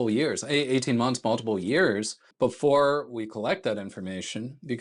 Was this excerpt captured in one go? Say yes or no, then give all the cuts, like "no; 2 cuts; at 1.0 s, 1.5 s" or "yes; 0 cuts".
no; 1 cut; at 2.2 s